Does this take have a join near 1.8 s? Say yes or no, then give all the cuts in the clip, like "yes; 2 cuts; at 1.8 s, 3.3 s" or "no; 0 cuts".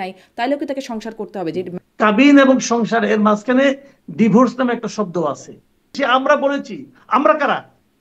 yes; 2 cuts; at 1.8 s, 5.9 s